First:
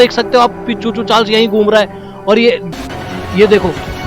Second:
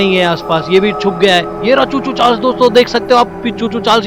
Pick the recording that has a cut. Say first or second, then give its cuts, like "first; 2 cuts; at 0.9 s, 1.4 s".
first; 1 cut; at 2.7 s